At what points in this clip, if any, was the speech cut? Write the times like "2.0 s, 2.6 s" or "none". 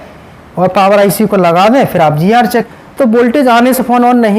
2.7 s